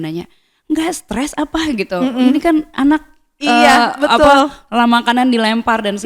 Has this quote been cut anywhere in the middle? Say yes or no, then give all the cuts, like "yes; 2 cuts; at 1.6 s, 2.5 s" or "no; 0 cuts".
no; 0 cuts